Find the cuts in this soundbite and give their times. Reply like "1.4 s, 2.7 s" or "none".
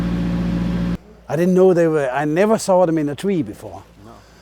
1.0 s